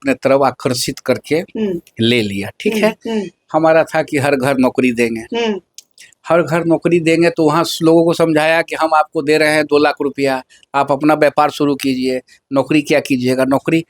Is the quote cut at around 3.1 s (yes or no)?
no